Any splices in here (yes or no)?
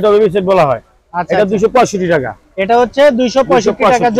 no